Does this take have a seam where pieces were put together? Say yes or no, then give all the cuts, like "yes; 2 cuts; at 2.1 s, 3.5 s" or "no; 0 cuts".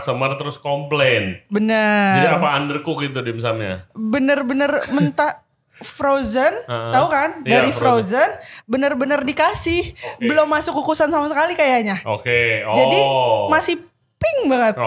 no; 0 cuts